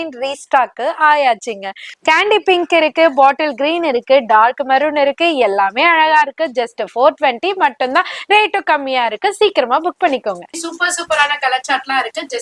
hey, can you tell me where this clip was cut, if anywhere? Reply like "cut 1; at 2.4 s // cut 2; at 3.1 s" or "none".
cut 1; at 1.9 s // cut 2; at 10.5 s